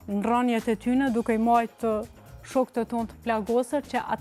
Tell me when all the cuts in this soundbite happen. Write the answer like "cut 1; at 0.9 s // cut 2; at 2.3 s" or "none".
none